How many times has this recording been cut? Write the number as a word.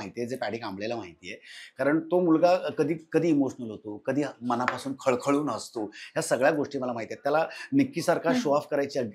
zero